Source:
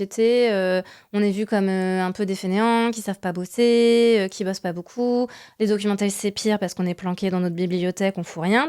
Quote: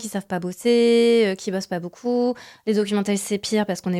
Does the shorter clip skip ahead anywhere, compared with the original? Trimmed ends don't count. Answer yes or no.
no